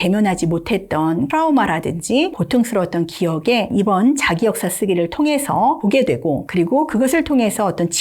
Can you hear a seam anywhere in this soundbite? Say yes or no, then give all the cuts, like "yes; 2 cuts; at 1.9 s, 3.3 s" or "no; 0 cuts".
yes; 4 cuts; at 1.3 s, 2.4 s, 3.7 s, 6.0 s